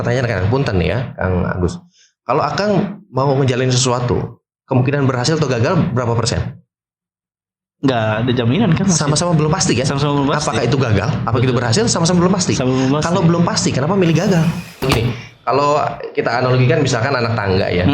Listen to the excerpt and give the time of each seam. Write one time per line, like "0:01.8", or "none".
0:14.8